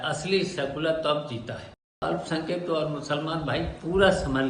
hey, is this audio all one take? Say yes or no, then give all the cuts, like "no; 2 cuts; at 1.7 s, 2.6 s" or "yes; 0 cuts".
no; 1 cut; at 2.0 s